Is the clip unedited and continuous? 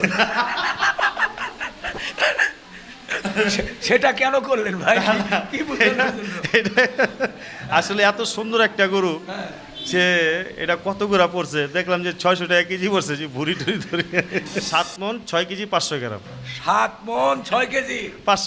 no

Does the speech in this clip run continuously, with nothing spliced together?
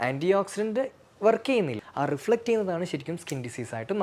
no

